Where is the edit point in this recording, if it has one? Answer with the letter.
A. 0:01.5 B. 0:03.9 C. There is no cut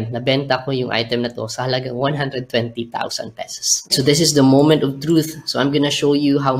B